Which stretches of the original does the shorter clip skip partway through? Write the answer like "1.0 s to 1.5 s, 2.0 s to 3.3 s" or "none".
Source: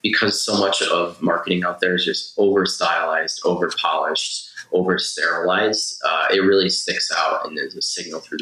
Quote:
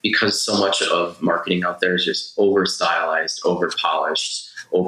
none